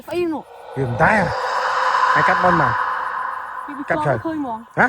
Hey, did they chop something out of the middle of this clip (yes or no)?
no